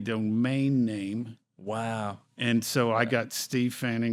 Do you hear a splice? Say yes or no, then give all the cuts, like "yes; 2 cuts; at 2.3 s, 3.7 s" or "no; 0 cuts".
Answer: no; 0 cuts